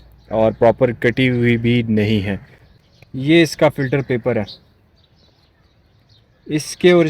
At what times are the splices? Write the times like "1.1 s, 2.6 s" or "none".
2.7 s